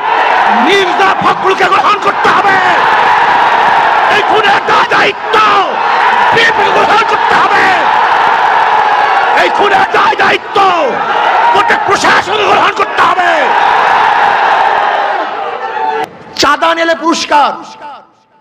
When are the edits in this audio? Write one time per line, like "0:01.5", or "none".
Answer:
0:16.0